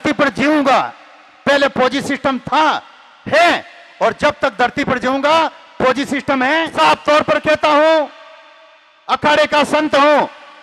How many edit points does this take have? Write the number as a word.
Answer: one